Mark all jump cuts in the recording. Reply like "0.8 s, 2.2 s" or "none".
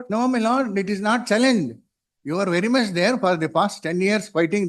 none

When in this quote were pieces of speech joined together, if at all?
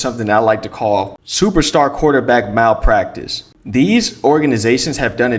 none

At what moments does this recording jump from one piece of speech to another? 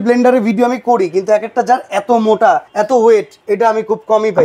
2.7 s, 3.3 s

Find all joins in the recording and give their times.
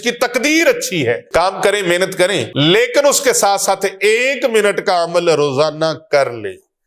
1.2 s, 2.5 s

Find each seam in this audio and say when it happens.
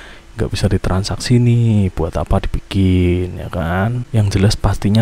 4.0 s

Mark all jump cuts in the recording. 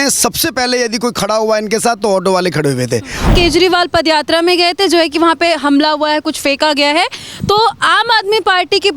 3.3 s

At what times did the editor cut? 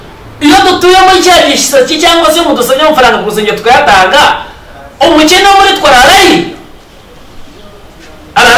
none

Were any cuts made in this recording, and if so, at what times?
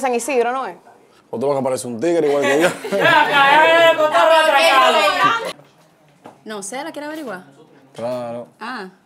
5.5 s

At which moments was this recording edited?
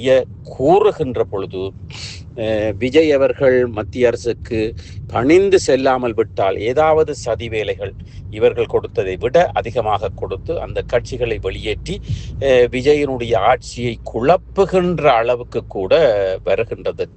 none

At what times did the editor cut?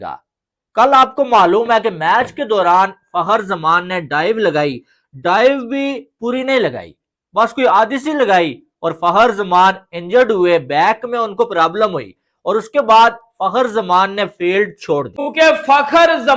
15.2 s

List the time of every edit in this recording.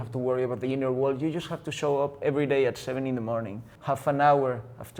3.6 s

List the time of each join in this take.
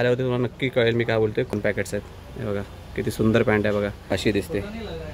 1.5 s, 4.2 s

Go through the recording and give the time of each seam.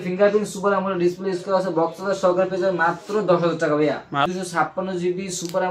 4.3 s

